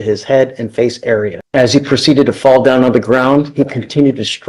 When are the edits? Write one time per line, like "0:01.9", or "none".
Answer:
0:01.4